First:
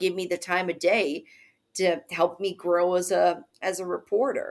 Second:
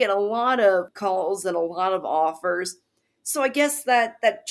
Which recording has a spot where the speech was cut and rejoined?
second; 1 cut; at 0.9 s

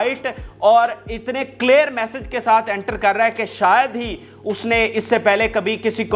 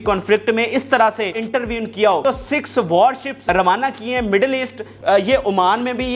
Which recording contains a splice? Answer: second; 4 cuts; at 1.4 s, 2.2 s, 3.4 s, 4.9 s

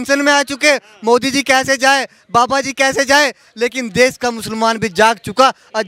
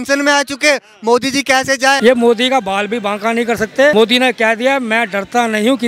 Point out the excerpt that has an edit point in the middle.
second; 2 cuts; at 2.0 s, 3.9 s

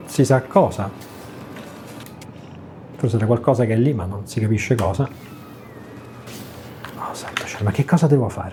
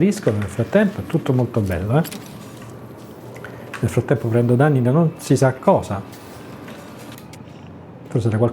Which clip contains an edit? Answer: second; 1 cut; at 3.2 s

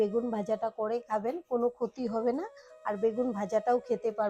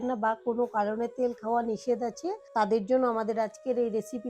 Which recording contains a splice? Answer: second; 1 cut; at 2.4 s

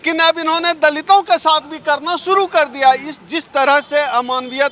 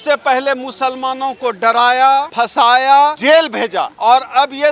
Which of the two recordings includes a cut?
second; 2 cuts; at 2.3 s, 3.6 s

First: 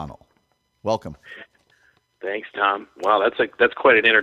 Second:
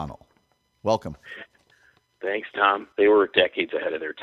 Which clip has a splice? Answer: second; 1 cut; at 2.9 s

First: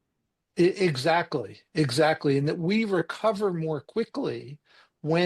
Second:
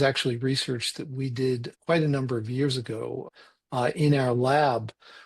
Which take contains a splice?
second; 2 cuts; at 1.7 s, 3.3 s

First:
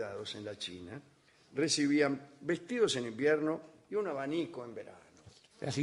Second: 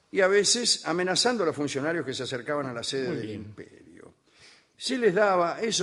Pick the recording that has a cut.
second; 1 cut; at 3.3 s

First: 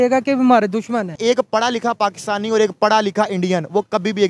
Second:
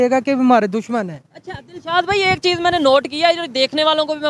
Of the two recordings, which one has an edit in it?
first; 1 cut; at 1.2 s

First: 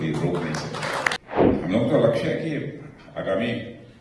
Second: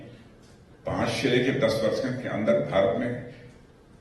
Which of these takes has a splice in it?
first; 1 cut; at 1.2 s

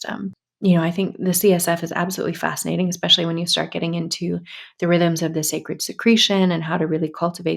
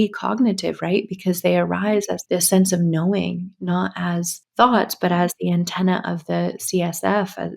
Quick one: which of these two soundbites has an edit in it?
second; 2 cuts; at 2.2 s, 4.4 s

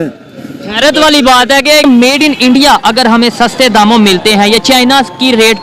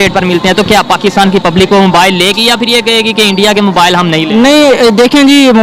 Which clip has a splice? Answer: first; 1 cut; at 1.8 s

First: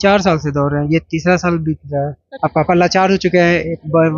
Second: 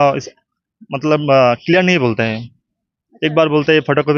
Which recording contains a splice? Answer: first; 1 cut; at 2.2 s

